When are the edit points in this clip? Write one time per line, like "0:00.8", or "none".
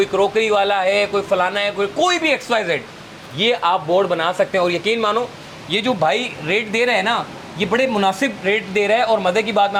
none